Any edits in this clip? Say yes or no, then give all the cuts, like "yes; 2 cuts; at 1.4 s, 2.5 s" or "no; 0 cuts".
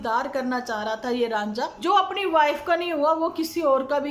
yes; 1 cut; at 1.8 s